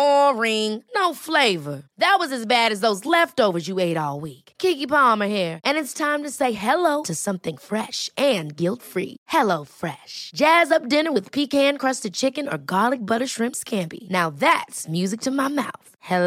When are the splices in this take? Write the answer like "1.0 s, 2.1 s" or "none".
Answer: none